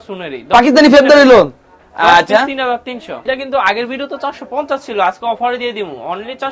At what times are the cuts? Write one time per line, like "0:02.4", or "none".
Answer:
0:03.1